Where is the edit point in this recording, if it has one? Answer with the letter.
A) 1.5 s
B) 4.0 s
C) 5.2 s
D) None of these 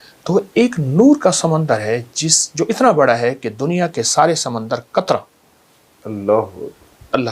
D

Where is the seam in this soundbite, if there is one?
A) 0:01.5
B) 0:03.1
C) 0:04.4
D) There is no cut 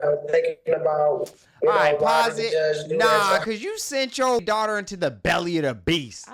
C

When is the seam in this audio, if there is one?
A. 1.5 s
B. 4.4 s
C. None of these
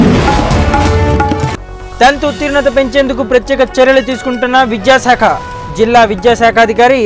A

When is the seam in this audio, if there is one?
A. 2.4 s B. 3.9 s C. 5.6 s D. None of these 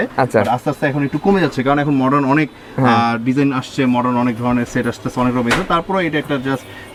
D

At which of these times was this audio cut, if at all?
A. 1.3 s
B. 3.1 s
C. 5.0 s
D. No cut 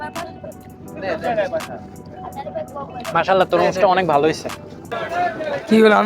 C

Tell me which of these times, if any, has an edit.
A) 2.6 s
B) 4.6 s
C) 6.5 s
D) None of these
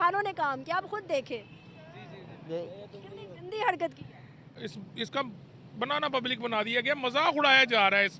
B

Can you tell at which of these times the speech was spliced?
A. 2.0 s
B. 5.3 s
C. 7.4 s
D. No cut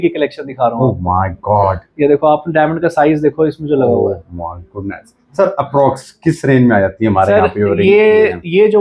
D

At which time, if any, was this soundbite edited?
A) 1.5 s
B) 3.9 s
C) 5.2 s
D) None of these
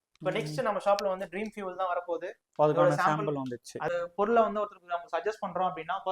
B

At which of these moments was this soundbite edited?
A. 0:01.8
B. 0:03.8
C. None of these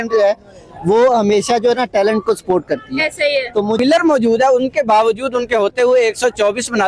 B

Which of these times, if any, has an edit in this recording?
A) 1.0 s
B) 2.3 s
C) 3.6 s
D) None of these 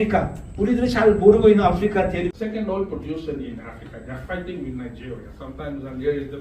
B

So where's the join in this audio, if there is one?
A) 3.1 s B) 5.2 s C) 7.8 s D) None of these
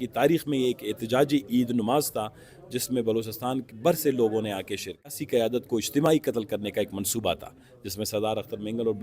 B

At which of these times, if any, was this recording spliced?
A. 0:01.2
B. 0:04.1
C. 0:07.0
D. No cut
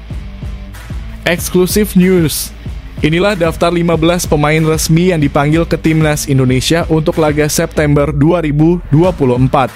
A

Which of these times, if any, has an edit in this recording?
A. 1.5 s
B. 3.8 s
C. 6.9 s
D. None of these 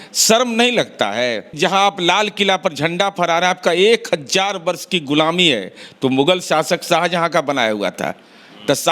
A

